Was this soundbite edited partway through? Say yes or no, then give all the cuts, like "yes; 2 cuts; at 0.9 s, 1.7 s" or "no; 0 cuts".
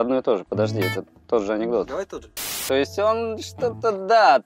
yes; 1 cut; at 2.6 s